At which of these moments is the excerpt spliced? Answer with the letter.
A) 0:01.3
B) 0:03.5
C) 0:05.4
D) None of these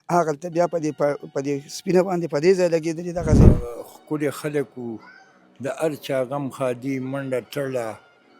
B